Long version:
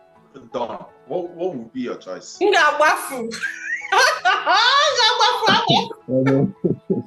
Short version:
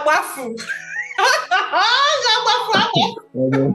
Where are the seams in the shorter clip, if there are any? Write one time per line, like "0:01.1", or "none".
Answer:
none